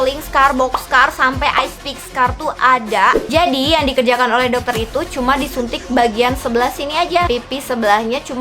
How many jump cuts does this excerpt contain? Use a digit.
2